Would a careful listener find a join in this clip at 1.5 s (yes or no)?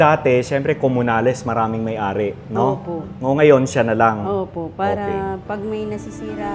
no